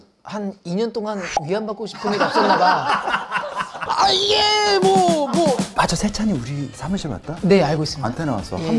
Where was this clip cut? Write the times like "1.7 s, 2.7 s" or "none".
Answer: 3.9 s, 5.7 s